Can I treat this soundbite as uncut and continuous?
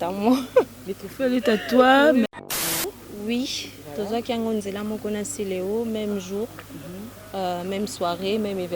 no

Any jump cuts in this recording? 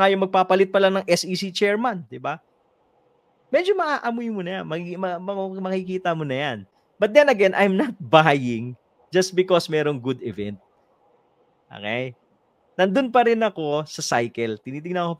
no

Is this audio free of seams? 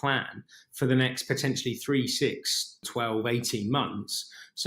no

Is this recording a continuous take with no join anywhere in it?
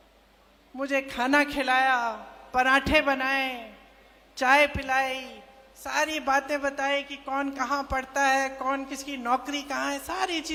yes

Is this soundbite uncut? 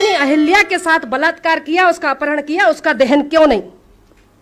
yes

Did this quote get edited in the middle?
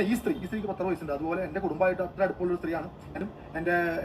yes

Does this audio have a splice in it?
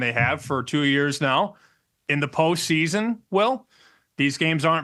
no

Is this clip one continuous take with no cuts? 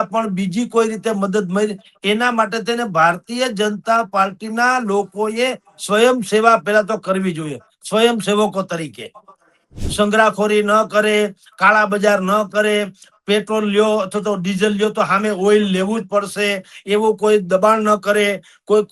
no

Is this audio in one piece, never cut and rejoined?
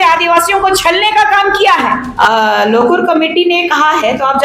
no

